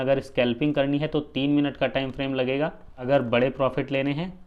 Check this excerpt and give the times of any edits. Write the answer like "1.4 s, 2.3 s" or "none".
3.0 s